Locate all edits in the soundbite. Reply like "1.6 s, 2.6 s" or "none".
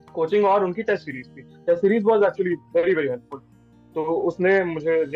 none